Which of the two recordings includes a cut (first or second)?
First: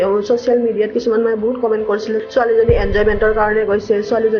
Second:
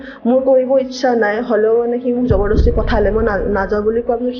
first